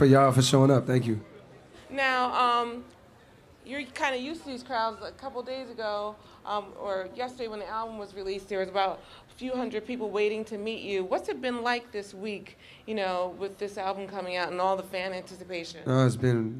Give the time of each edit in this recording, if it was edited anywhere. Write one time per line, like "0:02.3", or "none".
none

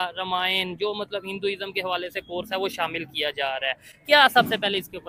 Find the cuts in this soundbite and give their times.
none

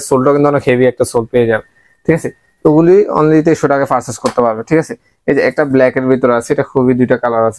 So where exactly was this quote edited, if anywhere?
none

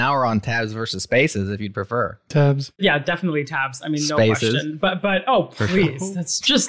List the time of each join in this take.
0:02.7

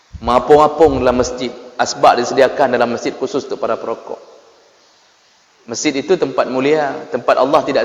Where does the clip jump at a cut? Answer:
none

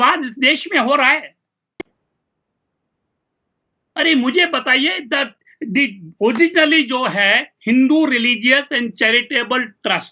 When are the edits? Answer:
none

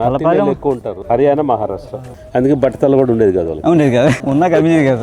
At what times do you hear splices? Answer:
0:00.9
0:04.2

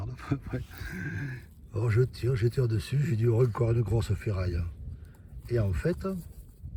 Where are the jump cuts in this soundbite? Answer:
none

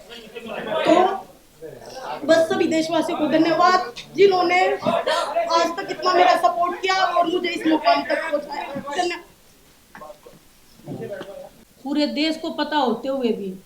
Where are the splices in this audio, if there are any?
0:11.6

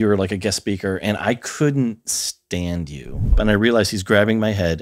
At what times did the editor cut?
0:03.4

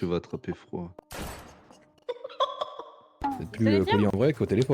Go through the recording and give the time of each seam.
0:03.1

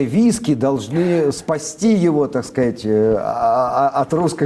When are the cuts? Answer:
none

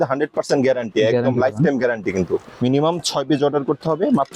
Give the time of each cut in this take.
0:02.5

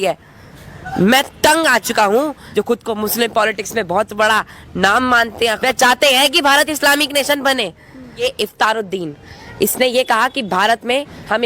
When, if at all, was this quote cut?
0:02.4
0:05.6
0:08.2

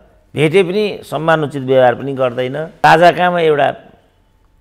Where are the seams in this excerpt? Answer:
0:02.8

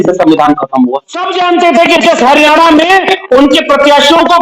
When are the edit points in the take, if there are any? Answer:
0:01.2

